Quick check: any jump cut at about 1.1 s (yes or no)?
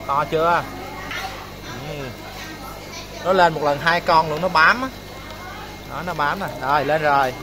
yes